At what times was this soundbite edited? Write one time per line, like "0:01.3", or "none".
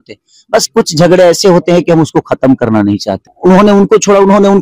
0:03.2